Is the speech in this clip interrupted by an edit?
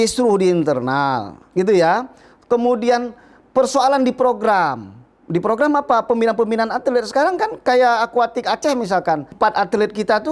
yes; 1 cut; at 9.3 s

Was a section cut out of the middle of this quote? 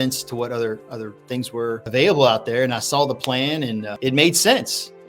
yes; 2 cuts; at 1.8 s, 3.9 s

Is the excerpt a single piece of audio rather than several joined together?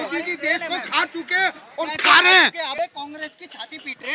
no; 1 cut; at 2.7 s

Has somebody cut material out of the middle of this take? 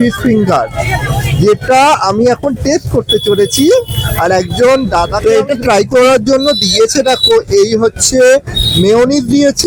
yes; 1 cut; at 5.2 s

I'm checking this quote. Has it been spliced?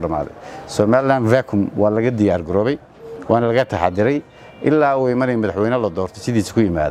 no; 0 cuts

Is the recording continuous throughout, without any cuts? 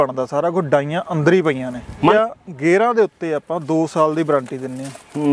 no; 1 cut; at 2.1 s

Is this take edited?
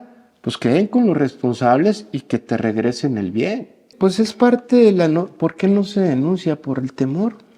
yes; 1 cut; at 3.9 s

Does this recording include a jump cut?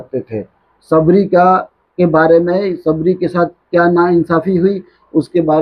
no; 0 cuts

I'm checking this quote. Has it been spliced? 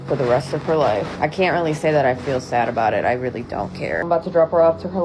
yes; 2 cuts; at 1.1 s, 4.1 s

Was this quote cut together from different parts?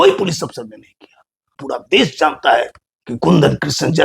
yes; 1 cut; at 1.5 s

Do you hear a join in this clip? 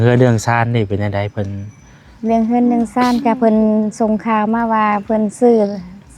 no; 0 cuts

